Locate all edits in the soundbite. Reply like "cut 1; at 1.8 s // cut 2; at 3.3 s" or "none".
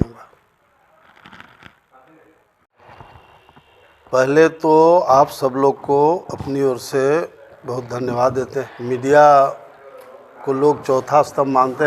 cut 1; at 2.8 s // cut 2; at 8.7 s